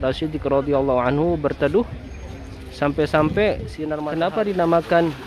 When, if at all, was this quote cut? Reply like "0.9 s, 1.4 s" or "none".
4.3 s